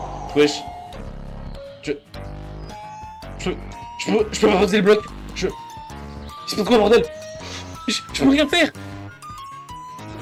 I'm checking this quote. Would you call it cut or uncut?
uncut